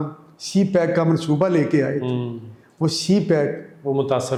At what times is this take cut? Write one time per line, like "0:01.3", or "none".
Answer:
none

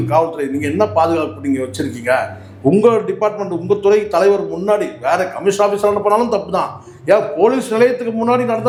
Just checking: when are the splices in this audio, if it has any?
none

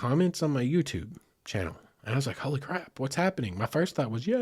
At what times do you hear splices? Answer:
none

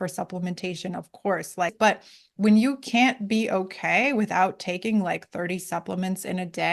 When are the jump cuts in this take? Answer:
0:01.7

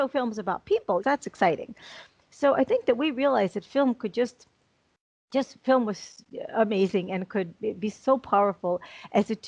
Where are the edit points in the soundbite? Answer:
0:01.0

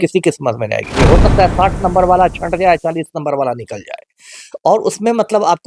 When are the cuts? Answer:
0:00.9

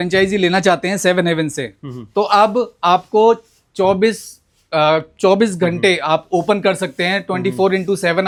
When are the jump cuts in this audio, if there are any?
none

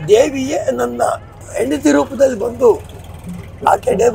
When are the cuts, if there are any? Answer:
0:01.4

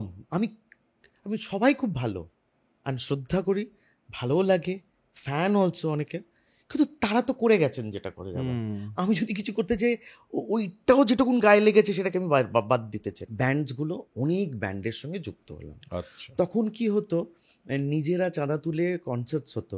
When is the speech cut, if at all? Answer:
0:13.2

